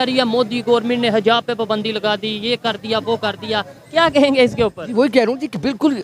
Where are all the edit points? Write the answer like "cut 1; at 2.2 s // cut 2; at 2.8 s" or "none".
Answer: none